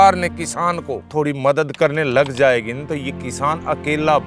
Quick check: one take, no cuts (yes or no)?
no